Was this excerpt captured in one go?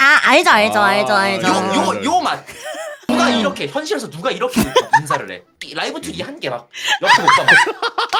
yes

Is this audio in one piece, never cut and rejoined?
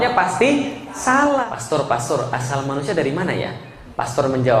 no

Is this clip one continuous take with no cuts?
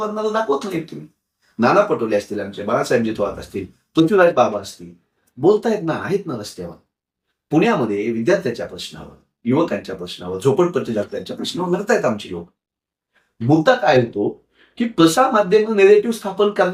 yes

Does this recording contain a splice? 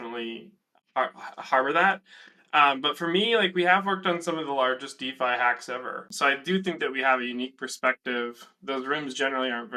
yes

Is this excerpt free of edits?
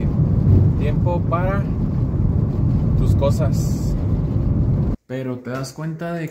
no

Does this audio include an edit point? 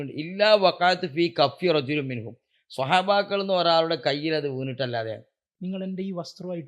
yes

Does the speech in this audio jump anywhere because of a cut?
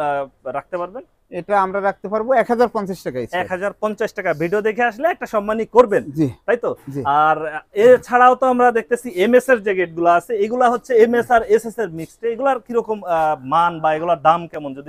no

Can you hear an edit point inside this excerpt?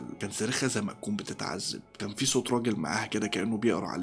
no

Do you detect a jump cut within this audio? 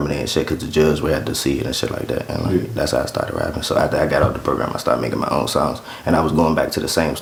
no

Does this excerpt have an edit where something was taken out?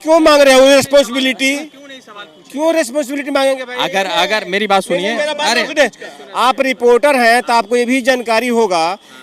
no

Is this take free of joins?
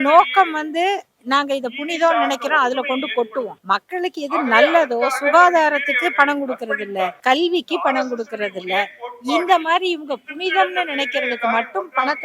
no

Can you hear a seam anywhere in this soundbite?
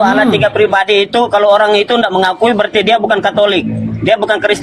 no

